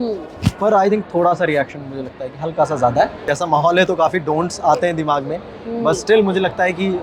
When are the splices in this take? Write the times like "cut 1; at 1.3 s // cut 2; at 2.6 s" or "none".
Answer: cut 1; at 3.3 s